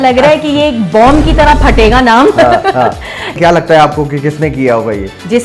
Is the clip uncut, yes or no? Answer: no